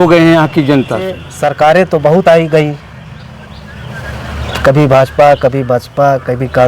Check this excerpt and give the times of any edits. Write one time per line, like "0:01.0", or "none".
0:01.3